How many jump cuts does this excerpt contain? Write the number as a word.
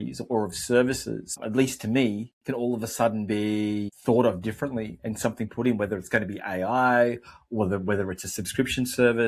two